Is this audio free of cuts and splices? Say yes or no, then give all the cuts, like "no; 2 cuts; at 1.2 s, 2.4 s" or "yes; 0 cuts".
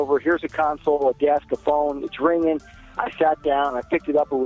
yes; 0 cuts